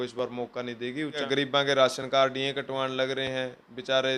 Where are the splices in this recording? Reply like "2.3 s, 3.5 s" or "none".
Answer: 1.2 s

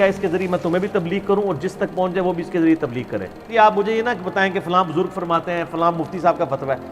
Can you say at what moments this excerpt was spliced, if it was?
3.4 s

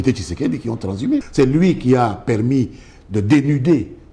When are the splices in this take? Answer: 1.3 s

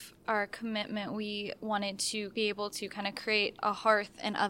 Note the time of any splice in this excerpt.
2.3 s, 3.6 s

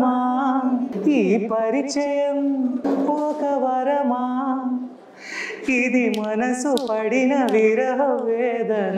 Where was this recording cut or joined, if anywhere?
0.9 s, 2.8 s

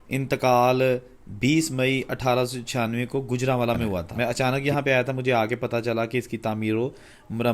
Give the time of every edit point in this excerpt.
4.1 s

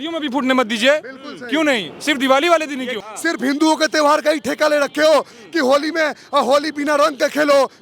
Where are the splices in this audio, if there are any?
3.0 s

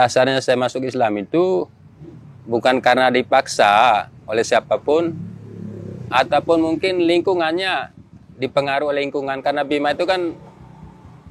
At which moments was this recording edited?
none

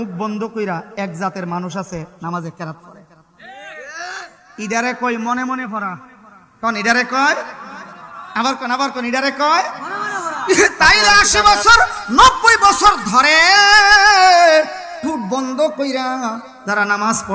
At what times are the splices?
10.3 s

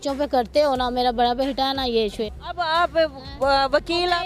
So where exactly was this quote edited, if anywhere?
2.1 s

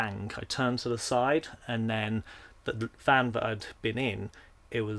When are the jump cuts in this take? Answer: none

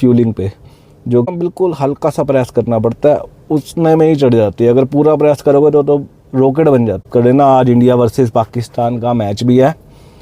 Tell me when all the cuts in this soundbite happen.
1.3 s, 7.1 s

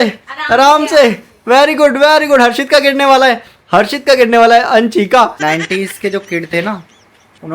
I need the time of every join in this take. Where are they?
5.4 s

